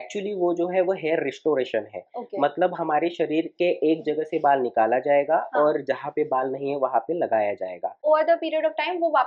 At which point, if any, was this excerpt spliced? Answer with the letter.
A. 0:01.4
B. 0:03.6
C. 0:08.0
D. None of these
C